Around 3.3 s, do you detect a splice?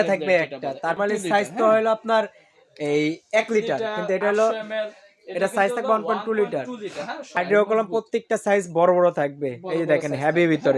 no; 2 cuts; at 1.0 s, 7.4 s

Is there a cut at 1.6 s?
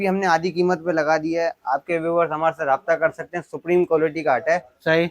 no; 0 cuts

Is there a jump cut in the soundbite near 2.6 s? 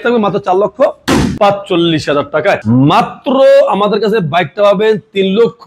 yes; 2 cuts; at 1.3 s, 2.6 s

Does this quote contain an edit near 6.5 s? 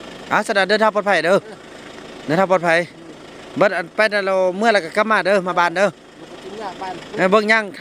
no; 0 cuts

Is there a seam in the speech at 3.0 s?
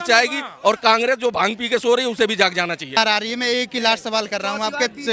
yes; 1 cut; at 3.0 s

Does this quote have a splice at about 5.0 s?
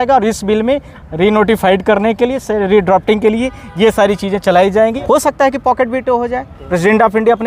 yes; 1 cut; at 5.0 s

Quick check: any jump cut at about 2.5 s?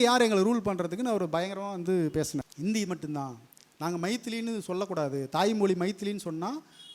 yes; 1 cut; at 2.5 s

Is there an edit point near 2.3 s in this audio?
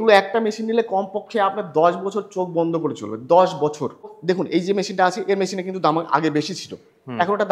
no; 1 cut; at 4.1 s

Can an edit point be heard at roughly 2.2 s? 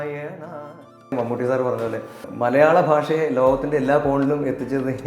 yes; 2 cuts; at 1.1 s, 2.2 s

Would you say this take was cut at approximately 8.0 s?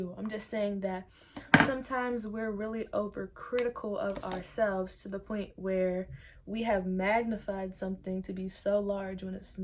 no; 0 cuts

